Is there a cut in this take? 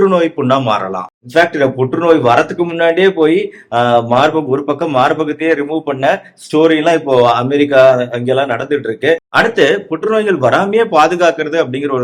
yes; 2 cuts; at 1.1 s, 9.3 s

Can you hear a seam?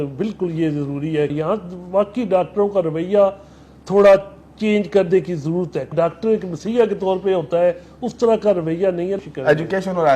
yes; 3 cuts; at 1.3 s, 5.9 s, 9.2 s

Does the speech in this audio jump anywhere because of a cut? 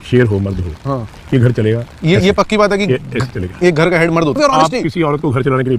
yes; 1 cut; at 4.4 s

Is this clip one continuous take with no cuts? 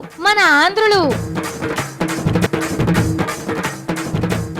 no; 1 cut; at 2.5 s

